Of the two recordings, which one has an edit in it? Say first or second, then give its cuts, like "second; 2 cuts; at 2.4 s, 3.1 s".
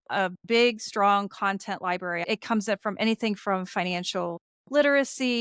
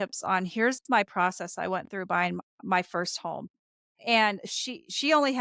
first; 1 cut; at 2.2 s